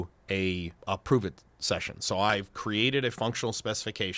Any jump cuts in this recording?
yes; 1 cut; at 2.3 s

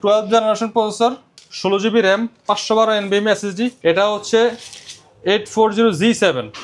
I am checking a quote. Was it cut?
yes; 1 cut; at 3.8 s

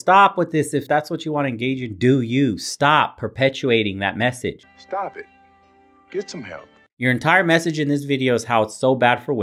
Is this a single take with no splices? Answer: no; 2 cuts; at 0.8 s, 4.7 s

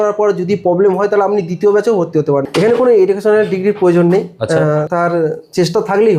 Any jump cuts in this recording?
yes; 2 cuts; at 2.5 s, 4.9 s

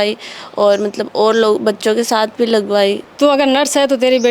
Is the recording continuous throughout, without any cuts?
no; 1 cut; at 3.1 s

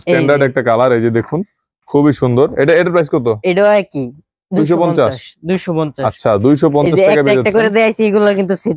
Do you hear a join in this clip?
no; 0 cuts

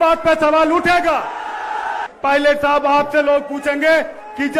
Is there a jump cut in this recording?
yes; 1 cut; at 2.1 s

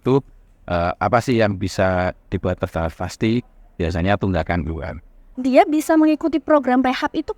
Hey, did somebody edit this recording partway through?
yes; 1 cut; at 5.3 s

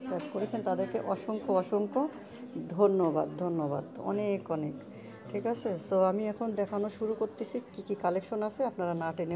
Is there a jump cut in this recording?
no; 0 cuts

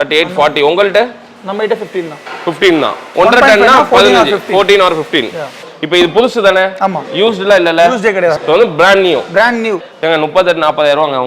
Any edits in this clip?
yes; 3 cuts; at 3.1 s, 5.6 s, 9.8 s

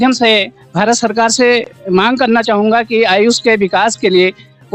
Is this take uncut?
yes; 0 cuts

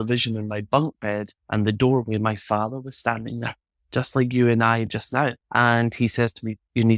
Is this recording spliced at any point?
yes; 2 cuts; at 1.4 s, 5.4 s

